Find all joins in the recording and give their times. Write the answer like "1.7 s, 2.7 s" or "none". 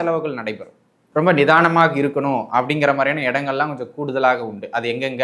0.9 s